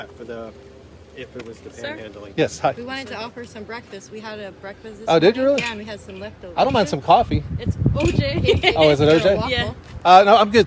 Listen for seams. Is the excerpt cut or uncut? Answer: uncut